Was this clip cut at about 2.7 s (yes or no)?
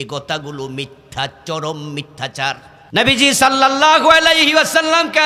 yes